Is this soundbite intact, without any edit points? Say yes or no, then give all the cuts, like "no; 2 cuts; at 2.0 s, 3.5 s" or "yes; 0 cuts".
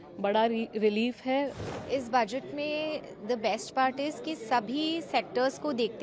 no; 1 cut; at 1.7 s